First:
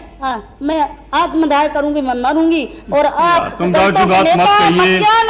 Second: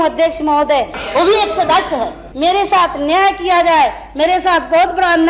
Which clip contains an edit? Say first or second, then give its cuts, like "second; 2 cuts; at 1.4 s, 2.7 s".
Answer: second; 2 cuts; at 1.0 s, 2.2 s